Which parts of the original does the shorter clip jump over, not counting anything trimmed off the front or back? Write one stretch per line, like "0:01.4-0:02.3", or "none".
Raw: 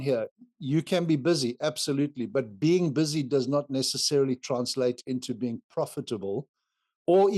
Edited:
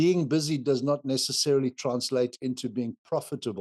none